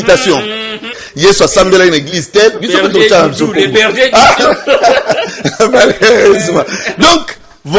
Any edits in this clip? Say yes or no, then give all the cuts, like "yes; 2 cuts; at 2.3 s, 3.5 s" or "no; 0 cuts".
yes; 1 cut; at 1.0 s